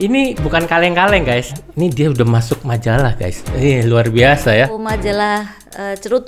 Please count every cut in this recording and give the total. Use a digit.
2